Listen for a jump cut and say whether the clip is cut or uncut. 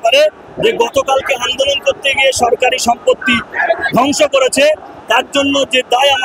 uncut